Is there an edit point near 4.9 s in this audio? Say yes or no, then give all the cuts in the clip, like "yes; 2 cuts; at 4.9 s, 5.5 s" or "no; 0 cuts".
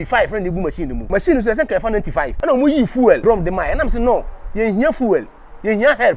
no; 3 cuts; at 1.0 s, 2.3 s, 3.2 s